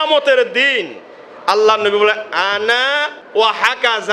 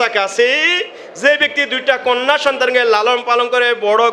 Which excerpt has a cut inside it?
first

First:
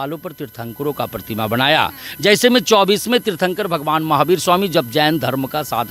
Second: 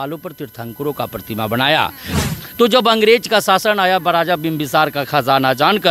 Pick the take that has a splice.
second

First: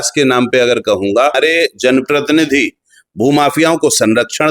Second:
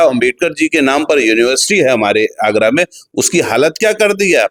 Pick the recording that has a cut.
first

